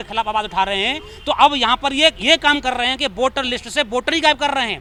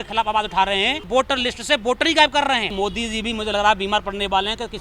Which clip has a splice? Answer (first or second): second